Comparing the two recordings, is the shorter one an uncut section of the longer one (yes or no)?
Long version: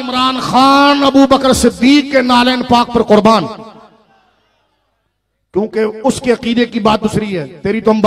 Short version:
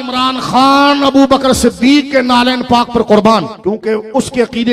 no